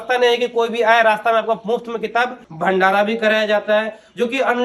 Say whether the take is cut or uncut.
cut